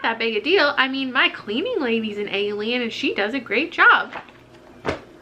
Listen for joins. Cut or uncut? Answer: uncut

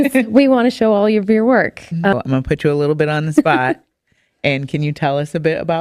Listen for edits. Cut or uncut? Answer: cut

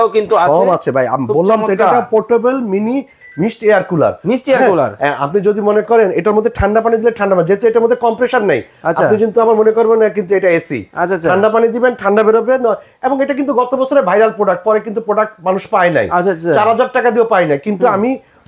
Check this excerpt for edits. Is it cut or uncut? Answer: uncut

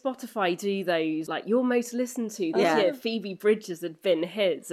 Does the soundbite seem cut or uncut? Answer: cut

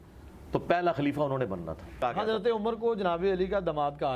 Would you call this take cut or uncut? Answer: cut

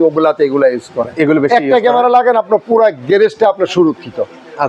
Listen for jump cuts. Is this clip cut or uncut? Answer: uncut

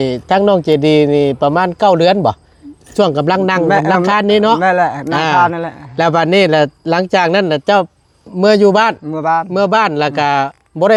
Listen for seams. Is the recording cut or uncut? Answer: uncut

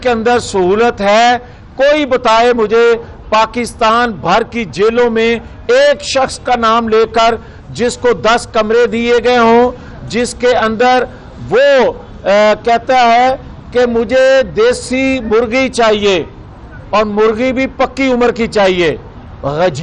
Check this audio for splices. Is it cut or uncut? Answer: uncut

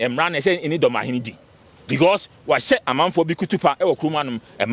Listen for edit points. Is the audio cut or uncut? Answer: uncut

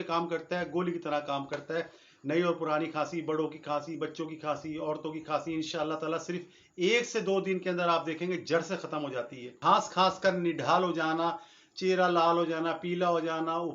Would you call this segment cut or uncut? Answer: cut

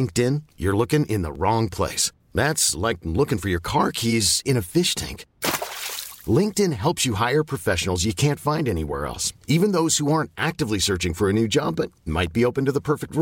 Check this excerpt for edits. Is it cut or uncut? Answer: uncut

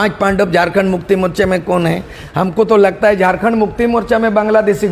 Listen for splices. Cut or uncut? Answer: cut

